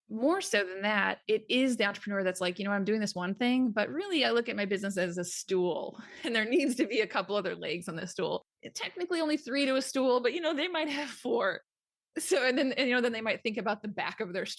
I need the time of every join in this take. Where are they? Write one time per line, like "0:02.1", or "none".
none